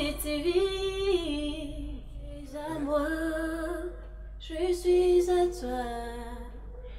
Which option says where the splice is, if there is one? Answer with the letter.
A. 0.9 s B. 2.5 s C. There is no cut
B